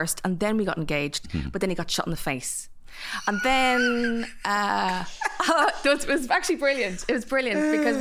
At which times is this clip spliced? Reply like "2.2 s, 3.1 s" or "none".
none